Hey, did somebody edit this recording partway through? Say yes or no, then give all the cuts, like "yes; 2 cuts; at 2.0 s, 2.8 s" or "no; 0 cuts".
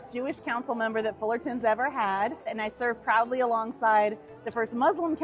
yes; 1 cut; at 2.6 s